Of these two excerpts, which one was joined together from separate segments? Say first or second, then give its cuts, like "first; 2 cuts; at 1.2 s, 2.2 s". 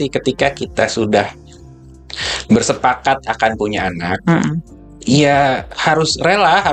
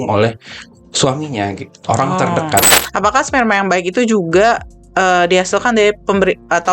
second; 1 cut; at 2.8 s